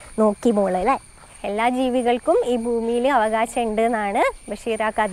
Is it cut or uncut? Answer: cut